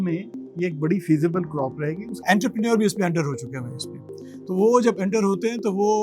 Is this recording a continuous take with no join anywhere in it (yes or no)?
no